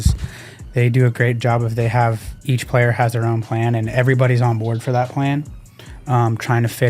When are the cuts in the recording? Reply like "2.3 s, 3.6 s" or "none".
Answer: 2.3 s